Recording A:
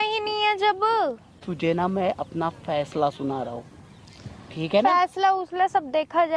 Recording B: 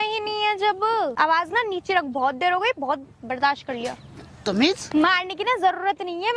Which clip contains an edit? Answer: B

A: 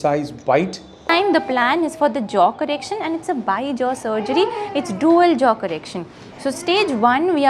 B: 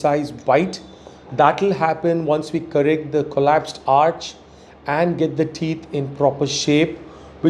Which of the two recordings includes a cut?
A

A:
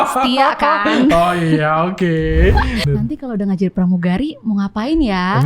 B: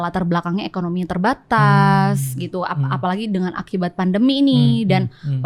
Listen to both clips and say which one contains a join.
A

